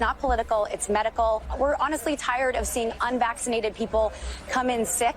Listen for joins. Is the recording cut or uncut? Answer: cut